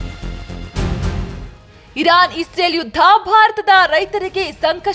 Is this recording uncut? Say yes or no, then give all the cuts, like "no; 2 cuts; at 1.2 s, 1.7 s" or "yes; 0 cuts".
no; 1 cut; at 1.9 s